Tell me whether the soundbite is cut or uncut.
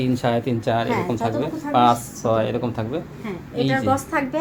uncut